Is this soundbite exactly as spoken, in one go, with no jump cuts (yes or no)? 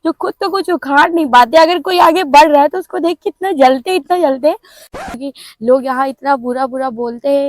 no